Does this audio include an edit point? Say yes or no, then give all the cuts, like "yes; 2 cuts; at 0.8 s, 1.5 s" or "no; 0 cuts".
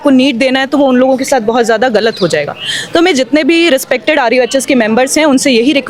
no; 0 cuts